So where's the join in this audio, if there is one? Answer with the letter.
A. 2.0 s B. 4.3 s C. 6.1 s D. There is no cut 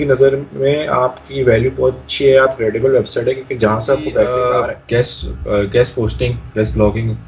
B